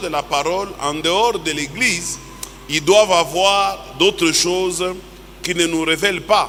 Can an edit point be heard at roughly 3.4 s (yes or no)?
no